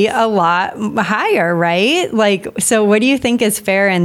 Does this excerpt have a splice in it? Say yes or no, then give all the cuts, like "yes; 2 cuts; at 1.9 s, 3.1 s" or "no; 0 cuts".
no; 0 cuts